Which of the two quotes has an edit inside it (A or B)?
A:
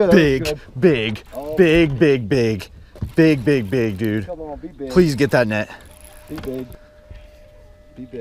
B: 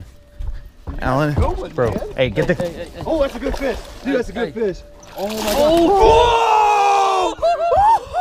A